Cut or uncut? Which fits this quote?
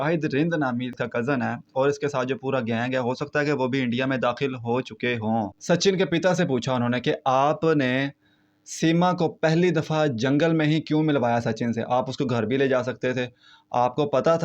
cut